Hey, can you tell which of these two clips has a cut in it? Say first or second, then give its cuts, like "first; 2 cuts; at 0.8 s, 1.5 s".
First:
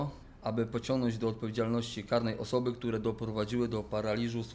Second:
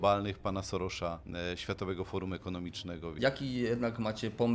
second; 2 cuts; at 1.2 s, 3.2 s